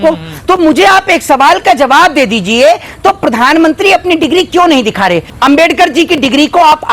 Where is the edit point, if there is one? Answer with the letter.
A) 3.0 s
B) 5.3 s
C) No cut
B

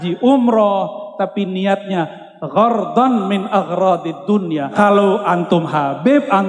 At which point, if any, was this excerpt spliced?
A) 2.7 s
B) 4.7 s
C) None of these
B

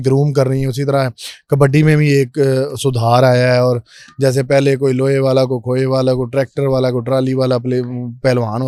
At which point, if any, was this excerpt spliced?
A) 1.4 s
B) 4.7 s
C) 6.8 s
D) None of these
D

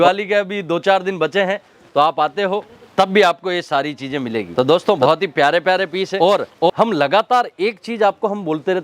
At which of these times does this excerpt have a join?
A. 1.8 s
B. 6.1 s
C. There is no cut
C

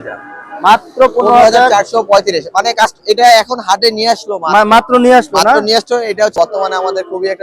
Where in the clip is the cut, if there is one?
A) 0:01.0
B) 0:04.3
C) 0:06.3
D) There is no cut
C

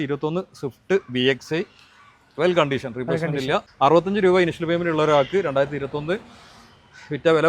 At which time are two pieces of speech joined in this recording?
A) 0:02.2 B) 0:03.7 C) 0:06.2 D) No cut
B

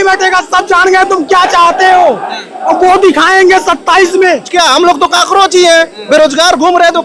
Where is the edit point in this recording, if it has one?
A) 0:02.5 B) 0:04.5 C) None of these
B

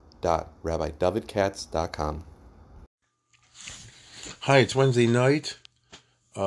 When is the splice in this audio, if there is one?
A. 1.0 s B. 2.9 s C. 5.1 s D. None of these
B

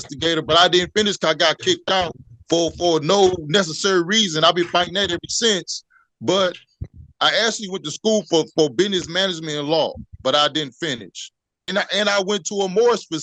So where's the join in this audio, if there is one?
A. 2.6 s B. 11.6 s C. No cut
B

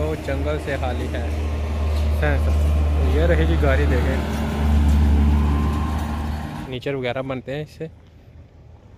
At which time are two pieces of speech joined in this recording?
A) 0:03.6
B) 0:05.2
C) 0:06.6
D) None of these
C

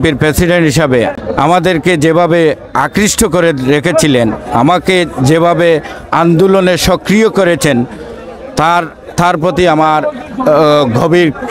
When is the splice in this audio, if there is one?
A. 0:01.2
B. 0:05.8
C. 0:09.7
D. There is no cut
A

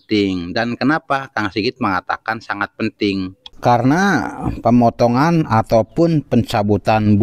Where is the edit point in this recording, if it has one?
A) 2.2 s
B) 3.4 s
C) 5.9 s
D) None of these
B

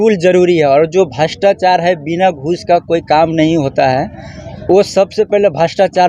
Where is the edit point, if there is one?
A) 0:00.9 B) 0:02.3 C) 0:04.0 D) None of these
D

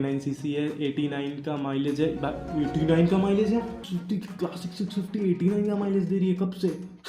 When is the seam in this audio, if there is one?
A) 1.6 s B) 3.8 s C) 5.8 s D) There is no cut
B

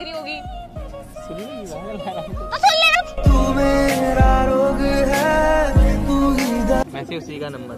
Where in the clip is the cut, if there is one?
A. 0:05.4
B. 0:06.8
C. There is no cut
B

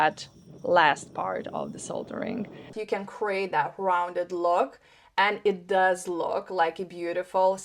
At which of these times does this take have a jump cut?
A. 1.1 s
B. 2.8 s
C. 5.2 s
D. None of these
B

